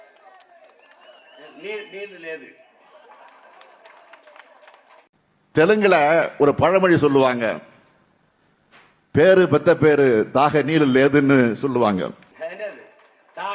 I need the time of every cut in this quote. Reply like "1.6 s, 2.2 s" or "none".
12.3 s